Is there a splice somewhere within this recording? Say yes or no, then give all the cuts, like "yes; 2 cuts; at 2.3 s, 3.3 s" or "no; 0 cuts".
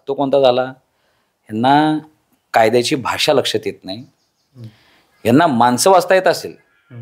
no; 0 cuts